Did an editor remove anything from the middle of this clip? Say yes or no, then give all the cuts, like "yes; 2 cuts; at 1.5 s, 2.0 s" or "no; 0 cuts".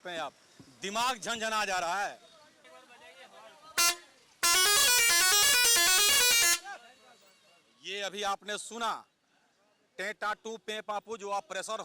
no; 0 cuts